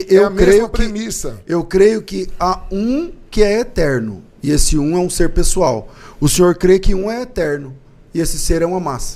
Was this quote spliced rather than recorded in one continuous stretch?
no; 0 cuts

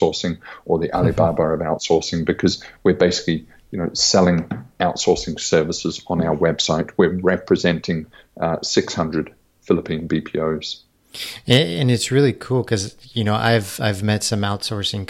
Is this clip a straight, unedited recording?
yes; 0 cuts

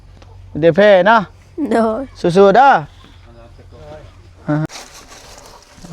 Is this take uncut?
no; 1 cut; at 4.7 s

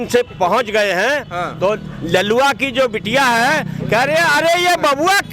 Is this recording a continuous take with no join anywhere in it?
yes; 0 cuts

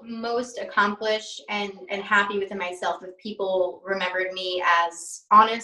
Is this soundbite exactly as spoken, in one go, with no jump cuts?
yes; 0 cuts

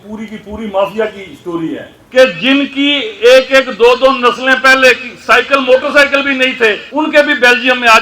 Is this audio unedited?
no; 2 cuts; at 2.0 s, 6.8 s

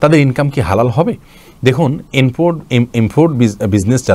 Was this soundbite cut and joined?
no; 0 cuts

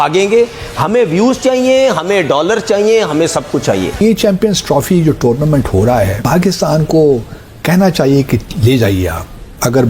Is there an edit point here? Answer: yes; 2 cuts; at 4.0 s, 6.2 s

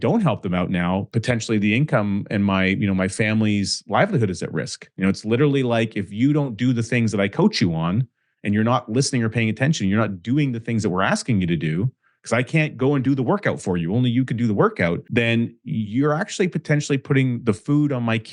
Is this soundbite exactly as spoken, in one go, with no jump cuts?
no; 3 cuts; at 1.1 s, 4.9 s, 15.0 s

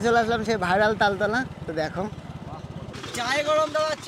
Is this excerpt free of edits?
no; 1 cut; at 2.8 s

